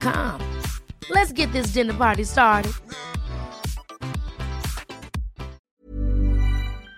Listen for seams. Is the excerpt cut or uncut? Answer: cut